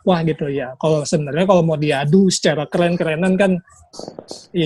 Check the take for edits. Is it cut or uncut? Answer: uncut